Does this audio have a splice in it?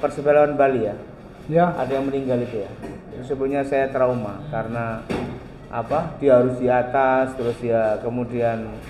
no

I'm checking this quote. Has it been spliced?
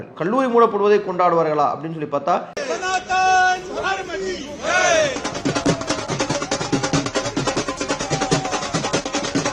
no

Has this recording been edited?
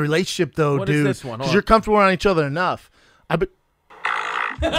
no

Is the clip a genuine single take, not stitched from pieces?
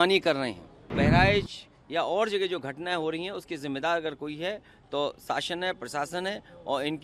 no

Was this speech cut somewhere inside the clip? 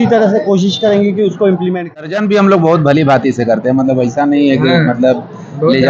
yes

